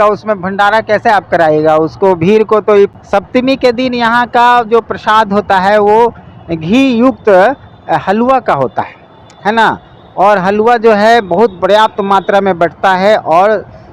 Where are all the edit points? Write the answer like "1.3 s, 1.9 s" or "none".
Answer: 2.9 s